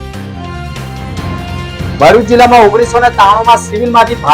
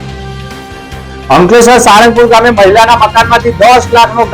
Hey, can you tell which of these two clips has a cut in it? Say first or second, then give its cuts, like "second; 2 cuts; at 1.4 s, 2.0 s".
first; 1 cut; at 1.3 s